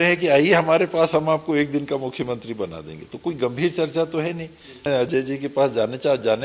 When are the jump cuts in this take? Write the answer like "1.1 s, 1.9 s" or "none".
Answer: 4.8 s